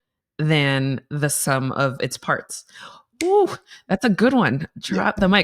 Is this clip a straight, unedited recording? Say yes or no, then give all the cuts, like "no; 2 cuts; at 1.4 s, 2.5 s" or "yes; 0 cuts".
yes; 0 cuts